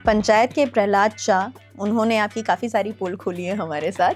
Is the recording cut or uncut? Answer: uncut